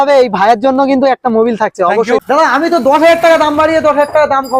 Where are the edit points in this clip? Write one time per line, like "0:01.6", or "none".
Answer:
0:02.2